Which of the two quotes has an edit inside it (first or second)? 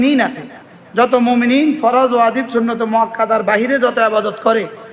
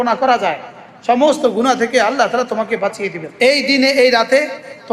second